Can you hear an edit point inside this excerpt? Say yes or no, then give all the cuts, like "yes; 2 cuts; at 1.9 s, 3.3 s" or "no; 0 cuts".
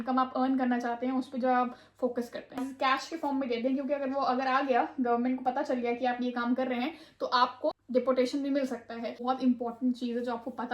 yes; 3 cuts; at 2.7 s, 7.7 s, 9.2 s